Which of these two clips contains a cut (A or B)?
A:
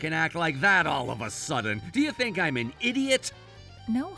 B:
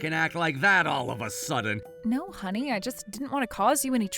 B